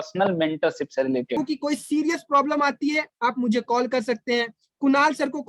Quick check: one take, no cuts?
no; 1 cut; at 1.4 s

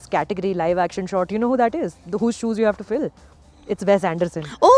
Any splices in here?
no; 0 cuts

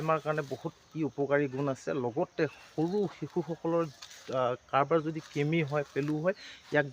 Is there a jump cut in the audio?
no; 0 cuts

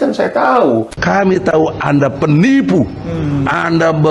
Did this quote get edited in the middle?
yes; 1 cut; at 0.9 s

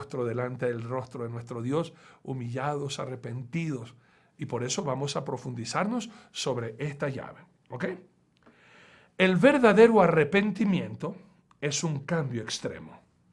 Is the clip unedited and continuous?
yes; 0 cuts

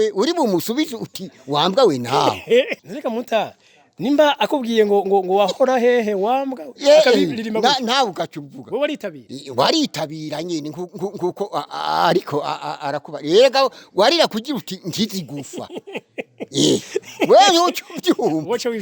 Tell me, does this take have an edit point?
yes; 1 cut; at 2.8 s

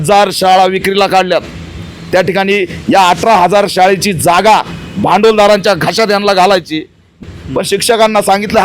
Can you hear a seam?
yes; 1 cut; at 7.2 s

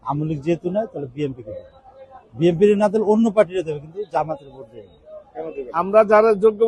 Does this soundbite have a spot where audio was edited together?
yes; 1 cut; at 5.6 s

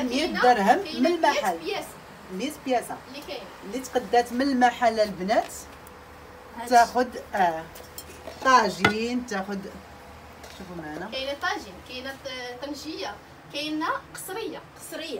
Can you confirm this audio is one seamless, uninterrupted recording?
yes; 0 cuts

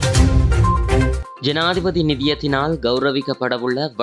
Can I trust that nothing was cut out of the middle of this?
yes; 0 cuts

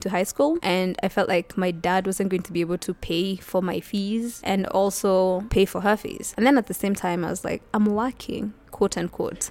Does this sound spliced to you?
no; 0 cuts

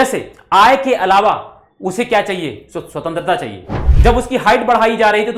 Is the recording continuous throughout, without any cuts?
no; 1 cut; at 3.9 s

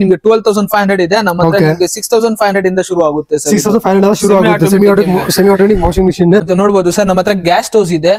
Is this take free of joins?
no; 1 cut; at 6.5 s

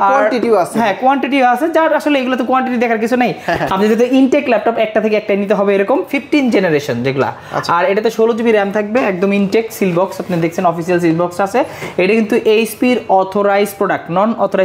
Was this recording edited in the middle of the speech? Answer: yes; 1 cut; at 6.2 s

